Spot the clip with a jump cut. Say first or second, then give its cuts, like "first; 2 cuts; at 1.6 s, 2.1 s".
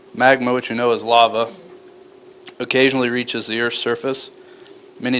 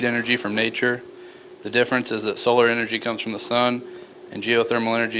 second; 1 cut; at 2.3 s